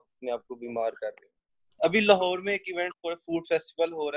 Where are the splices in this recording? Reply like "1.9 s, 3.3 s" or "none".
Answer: 1.6 s